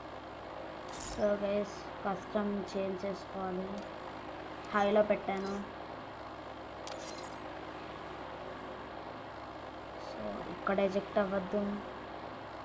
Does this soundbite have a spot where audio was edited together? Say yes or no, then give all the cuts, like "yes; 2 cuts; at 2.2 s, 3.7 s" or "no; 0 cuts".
no; 0 cuts